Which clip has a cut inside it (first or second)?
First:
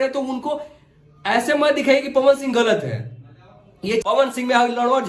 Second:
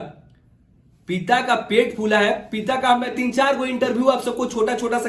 first